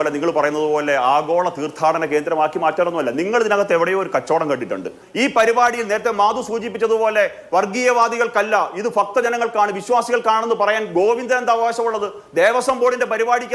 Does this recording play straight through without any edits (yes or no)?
no